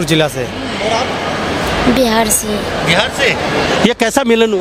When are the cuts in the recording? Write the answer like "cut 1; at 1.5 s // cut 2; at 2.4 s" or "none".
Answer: none